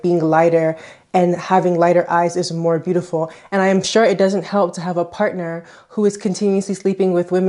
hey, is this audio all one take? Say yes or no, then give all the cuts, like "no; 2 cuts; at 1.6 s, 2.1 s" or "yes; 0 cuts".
yes; 0 cuts